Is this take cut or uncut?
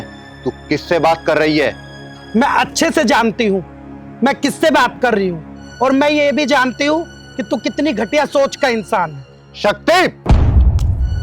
cut